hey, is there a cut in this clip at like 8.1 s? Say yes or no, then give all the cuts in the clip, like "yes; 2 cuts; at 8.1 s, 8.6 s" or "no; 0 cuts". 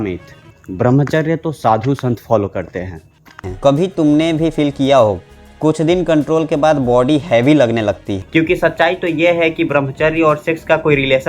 yes; 2 cuts; at 3.5 s, 8.1 s